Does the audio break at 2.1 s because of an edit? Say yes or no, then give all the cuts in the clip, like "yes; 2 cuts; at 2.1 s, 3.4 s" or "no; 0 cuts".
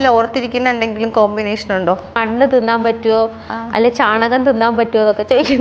yes; 1 cut; at 2.1 s